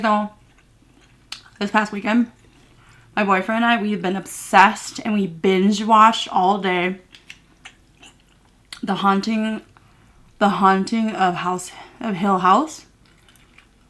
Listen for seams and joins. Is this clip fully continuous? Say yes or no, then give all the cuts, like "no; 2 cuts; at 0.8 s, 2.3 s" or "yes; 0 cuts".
yes; 0 cuts